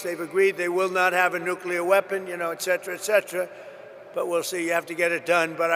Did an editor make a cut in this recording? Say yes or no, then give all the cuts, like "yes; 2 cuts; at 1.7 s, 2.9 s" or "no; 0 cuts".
no; 0 cuts